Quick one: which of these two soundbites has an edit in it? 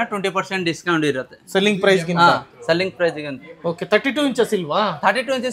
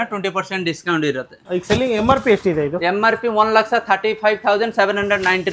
second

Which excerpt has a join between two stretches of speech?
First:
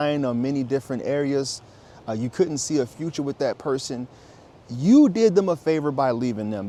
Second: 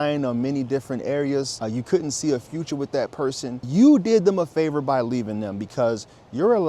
second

